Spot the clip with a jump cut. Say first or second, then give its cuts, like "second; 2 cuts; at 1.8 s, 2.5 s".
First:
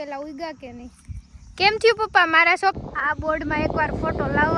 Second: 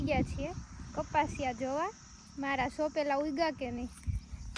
first; 1 cut; at 2.8 s